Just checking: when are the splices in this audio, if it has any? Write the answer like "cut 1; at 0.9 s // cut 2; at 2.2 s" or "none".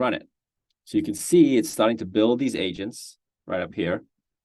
none